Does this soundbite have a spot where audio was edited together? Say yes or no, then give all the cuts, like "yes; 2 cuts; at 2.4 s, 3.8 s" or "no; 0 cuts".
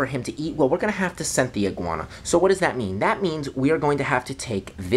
no; 0 cuts